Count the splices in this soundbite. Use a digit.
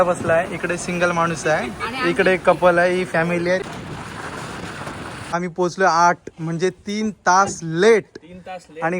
2